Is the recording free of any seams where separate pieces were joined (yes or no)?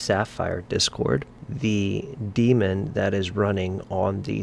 no